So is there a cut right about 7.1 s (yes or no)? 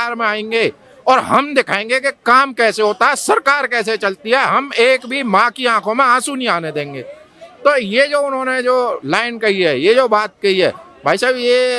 no